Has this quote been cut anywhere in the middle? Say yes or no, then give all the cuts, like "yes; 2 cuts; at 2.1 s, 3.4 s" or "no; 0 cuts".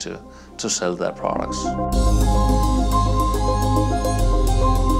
yes; 1 cut; at 1.5 s